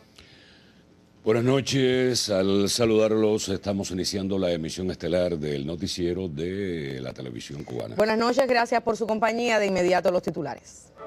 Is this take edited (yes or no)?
no